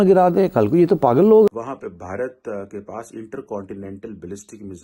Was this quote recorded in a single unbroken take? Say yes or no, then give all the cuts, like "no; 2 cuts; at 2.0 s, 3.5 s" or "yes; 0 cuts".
no; 1 cut; at 1.5 s